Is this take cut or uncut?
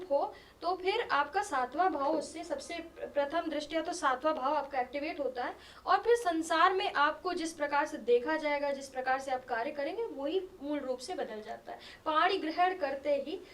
uncut